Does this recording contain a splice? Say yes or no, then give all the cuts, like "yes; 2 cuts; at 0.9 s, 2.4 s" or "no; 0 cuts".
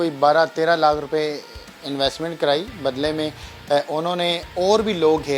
no; 0 cuts